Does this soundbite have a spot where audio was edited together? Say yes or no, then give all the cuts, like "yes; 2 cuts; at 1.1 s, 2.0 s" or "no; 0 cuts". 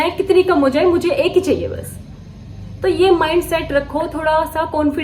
no; 0 cuts